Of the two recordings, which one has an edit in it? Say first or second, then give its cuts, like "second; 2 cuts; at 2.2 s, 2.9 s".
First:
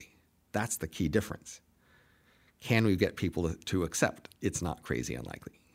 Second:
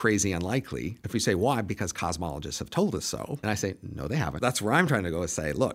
second; 3 cuts; at 1.0 s, 3.4 s, 4.4 s